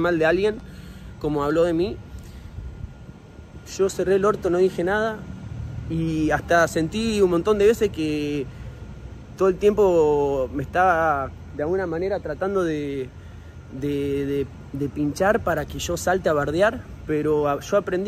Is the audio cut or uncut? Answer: uncut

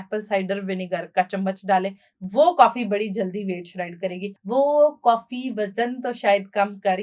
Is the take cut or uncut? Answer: cut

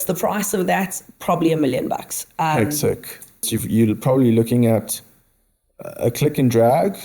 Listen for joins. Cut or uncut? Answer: cut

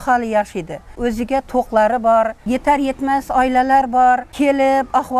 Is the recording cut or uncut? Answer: cut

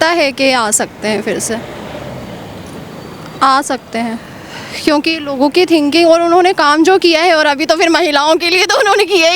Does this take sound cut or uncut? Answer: uncut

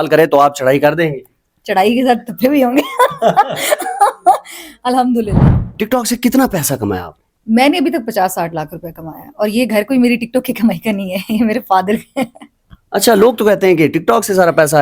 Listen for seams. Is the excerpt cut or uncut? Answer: cut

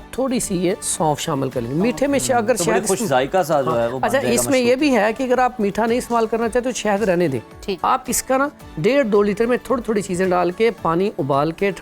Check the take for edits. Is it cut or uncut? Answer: uncut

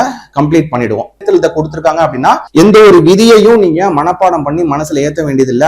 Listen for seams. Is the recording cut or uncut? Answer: cut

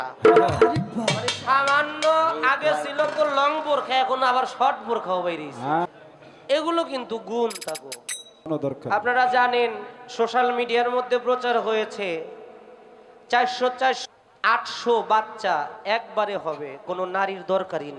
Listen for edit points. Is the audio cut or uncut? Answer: cut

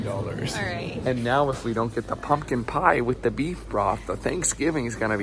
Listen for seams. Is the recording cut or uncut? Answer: cut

